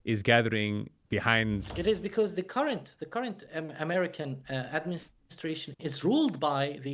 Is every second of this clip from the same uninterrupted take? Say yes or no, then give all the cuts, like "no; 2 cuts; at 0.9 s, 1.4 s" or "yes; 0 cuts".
no; 1 cut; at 1.7 s